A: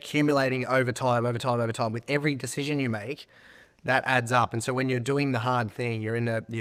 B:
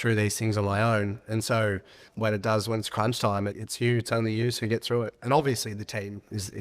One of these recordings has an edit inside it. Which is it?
B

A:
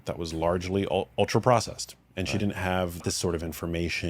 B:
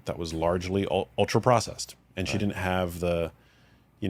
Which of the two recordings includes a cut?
A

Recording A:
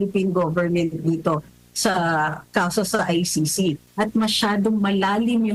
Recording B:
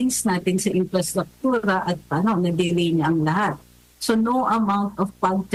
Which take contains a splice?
A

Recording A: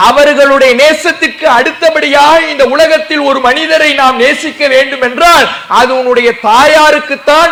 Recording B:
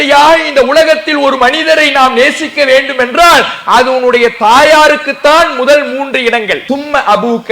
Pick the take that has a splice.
B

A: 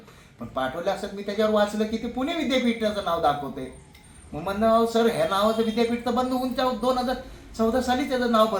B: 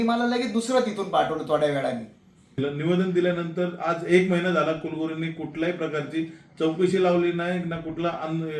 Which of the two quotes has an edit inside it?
B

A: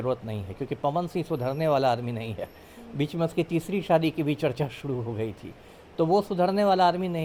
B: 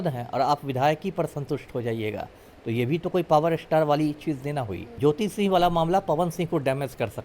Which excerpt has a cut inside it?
B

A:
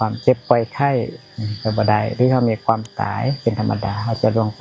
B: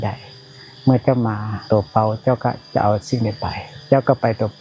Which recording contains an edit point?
B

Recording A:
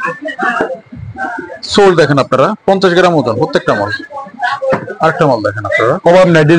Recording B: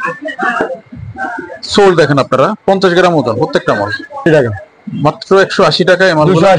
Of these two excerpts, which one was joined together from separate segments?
B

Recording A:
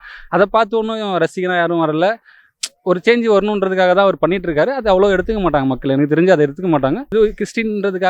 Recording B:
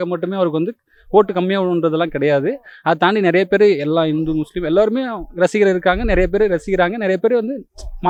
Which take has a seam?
A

